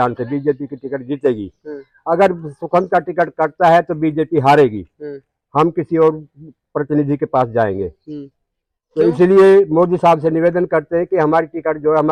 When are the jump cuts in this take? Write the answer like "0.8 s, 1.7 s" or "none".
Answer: none